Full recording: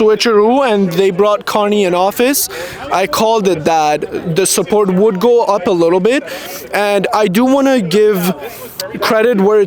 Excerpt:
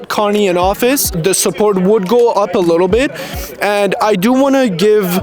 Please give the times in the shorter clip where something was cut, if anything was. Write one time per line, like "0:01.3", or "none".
0:01.1